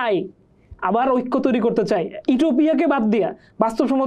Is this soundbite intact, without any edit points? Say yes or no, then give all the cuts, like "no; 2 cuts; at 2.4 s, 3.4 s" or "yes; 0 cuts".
yes; 0 cuts